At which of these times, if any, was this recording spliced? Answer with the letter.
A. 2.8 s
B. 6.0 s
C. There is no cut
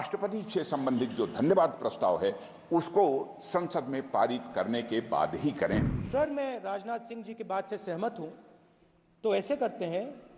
B